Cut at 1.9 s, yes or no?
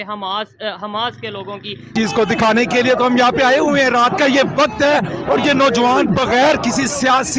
yes